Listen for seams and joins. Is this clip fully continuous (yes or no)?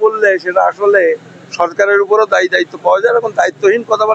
yes